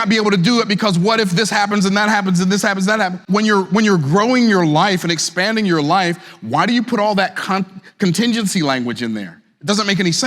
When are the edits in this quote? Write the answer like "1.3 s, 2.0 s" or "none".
3.2 s